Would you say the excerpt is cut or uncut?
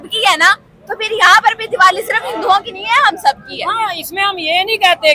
uncut